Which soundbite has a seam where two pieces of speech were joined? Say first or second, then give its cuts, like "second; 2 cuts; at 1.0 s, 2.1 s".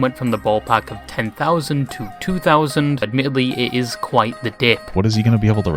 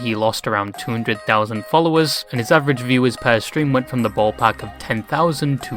first; 2 cuts; at 3.1 s, 4.9 s